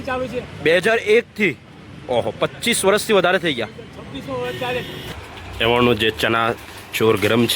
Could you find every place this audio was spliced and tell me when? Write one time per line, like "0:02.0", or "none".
0:05.1